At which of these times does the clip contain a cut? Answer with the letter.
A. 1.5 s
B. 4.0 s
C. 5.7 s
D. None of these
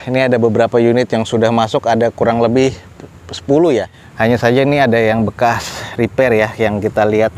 B